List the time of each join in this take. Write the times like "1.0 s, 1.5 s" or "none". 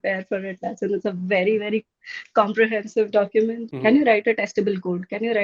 3.7 s